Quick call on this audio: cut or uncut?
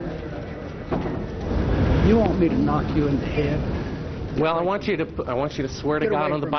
cut